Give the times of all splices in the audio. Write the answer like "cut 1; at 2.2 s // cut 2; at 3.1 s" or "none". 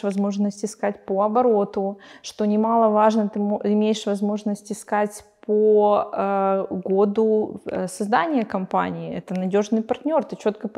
none